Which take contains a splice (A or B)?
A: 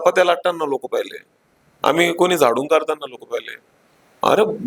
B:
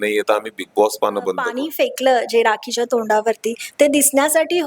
B